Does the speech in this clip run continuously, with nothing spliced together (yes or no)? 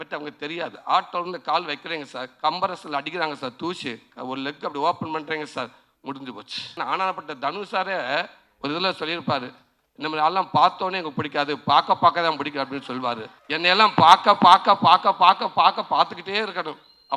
no